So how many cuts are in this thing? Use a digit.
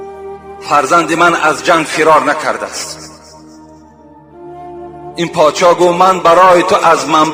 0